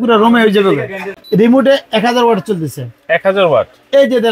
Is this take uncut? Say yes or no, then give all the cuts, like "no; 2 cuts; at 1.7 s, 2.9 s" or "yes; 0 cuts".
no; 1 cut; at 1.0 s